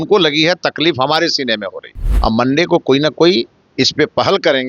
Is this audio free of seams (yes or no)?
no